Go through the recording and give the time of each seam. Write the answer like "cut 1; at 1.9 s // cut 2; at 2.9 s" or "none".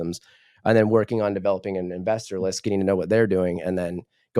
none